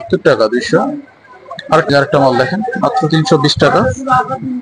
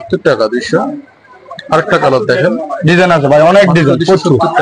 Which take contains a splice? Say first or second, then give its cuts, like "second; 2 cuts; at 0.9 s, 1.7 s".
first; 1 cut; at 1.9 s